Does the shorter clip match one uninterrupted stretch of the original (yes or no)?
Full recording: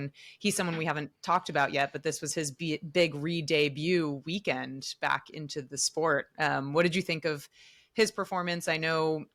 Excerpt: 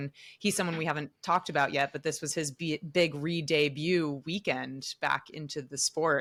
yes